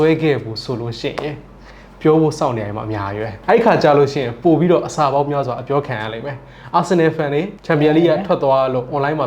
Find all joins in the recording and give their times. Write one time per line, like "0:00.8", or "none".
0:03.4
0:07.6